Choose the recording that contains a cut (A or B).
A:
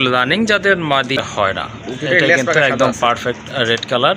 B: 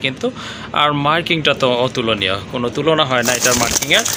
A